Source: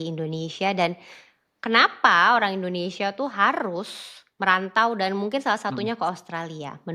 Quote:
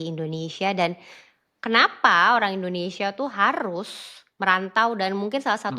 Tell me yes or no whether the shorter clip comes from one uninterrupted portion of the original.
yes